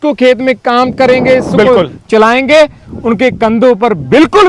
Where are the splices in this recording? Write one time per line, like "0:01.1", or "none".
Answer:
none